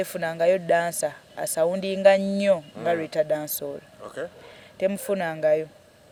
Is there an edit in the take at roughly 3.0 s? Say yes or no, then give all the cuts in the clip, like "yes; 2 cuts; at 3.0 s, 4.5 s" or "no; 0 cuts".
no; 0 cuts